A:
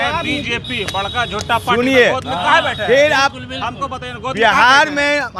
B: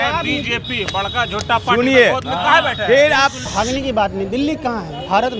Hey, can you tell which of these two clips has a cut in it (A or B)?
B